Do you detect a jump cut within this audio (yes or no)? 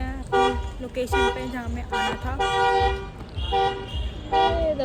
no